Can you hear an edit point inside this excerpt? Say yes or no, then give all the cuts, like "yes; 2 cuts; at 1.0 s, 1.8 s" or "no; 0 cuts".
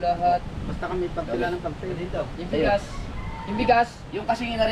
no; 0 cuts